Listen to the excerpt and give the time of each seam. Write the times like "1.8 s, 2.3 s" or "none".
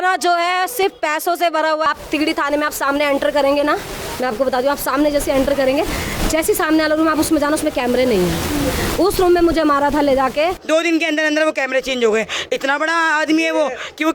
1.9 s, 10.6 s